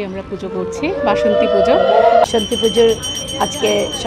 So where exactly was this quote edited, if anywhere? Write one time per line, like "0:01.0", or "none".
0:02.2